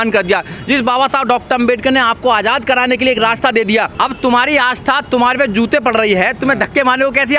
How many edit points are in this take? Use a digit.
1